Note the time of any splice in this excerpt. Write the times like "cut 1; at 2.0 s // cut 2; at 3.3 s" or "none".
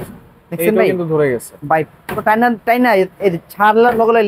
none